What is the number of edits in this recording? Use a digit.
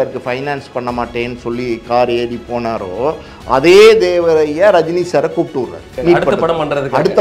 1